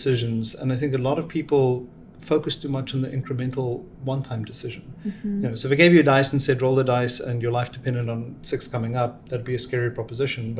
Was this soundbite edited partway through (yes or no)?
no